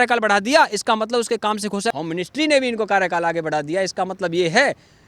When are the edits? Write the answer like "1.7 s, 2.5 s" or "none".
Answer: 1.9 s